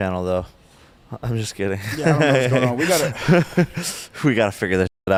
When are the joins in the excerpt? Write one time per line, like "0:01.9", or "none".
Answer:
none